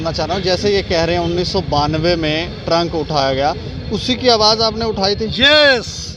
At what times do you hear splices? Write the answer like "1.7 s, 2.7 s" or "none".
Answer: none